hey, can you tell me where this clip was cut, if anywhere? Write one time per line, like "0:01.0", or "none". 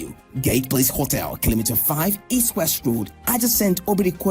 0:01.5